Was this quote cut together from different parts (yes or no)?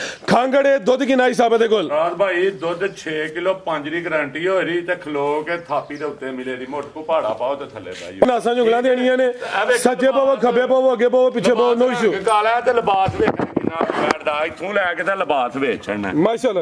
yes